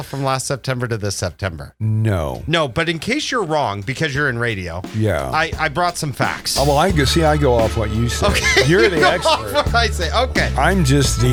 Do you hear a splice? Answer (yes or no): no